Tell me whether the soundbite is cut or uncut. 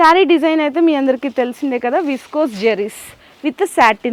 uncut